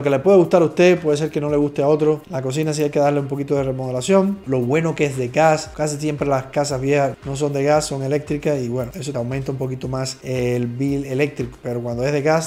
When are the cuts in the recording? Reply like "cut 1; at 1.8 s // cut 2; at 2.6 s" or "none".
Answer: none